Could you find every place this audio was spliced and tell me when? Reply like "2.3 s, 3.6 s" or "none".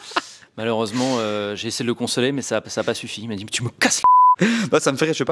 4.4 s